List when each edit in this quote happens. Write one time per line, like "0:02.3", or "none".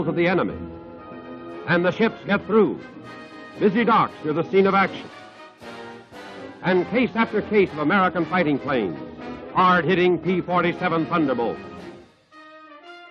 none